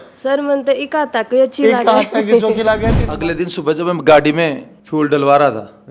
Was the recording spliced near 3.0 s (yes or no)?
yes